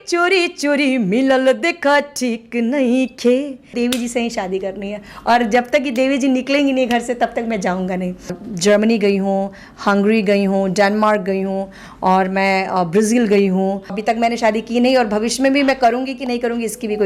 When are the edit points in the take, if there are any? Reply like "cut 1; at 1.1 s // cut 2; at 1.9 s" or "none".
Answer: cut 1; at 3.7 s // cut 2; at 8.4 s // cut 3; at 14.0 s